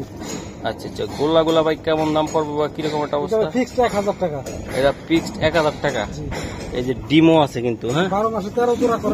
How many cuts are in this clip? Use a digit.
0